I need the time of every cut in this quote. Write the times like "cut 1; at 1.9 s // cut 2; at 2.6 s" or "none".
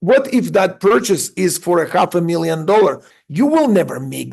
cut 1; at 3.1 s